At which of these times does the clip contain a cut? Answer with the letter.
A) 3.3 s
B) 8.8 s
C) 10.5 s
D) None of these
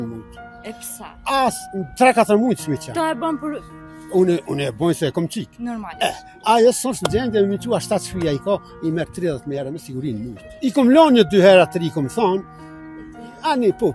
C